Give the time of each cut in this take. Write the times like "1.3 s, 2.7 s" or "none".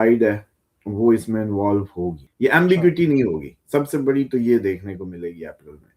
2.2 s